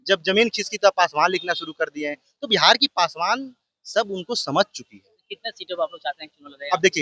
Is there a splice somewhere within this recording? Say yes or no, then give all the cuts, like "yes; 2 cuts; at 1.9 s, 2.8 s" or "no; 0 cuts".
no; 0 cuts